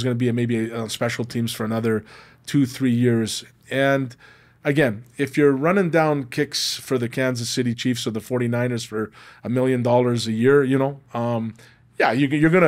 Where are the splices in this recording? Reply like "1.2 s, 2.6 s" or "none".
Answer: none